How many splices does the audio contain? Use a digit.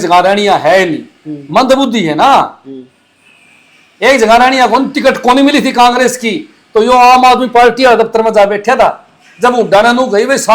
0